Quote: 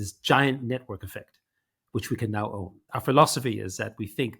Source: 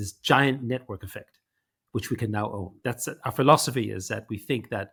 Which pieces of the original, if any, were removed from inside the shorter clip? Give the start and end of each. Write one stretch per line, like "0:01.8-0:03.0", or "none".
0:02.7-0:03.1